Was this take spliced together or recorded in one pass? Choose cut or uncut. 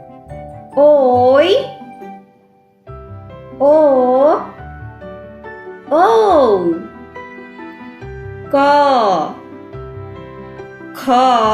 uncut